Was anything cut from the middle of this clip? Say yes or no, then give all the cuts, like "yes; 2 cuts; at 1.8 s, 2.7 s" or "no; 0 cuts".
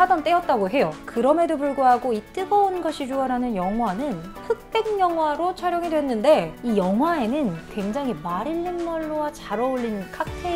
yes; 1 cut; at 6.5 s